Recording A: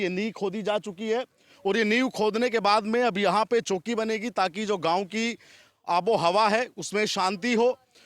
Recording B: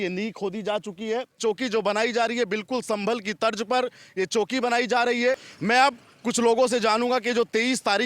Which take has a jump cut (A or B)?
B